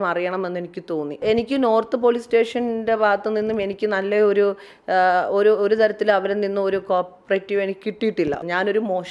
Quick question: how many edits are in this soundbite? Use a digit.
2